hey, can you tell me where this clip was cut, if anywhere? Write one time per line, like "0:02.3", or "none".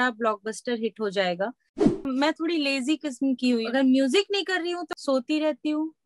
0:01.9
0:03.6
0:04.9